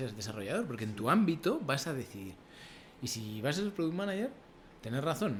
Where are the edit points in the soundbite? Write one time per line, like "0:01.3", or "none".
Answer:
none